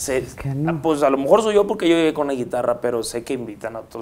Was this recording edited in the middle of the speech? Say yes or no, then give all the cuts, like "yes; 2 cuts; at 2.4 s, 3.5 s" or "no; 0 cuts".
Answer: no; 0 cuts